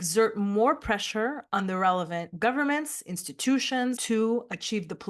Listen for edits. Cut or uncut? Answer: cut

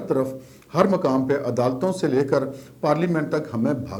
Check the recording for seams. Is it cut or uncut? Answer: uncut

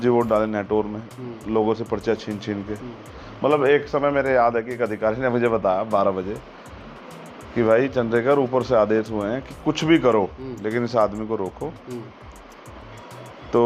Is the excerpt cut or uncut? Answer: uncut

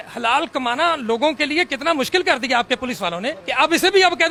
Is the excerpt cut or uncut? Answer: uncut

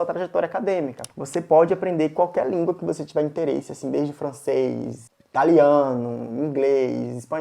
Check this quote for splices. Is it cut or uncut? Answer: cut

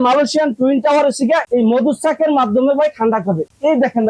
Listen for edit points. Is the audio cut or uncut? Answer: uncut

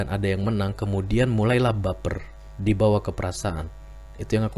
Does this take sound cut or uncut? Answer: uncut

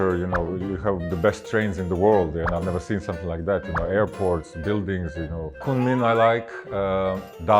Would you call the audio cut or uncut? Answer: cut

